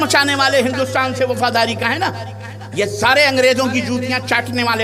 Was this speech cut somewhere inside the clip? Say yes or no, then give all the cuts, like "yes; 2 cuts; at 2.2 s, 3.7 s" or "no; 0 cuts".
no; 0 cuts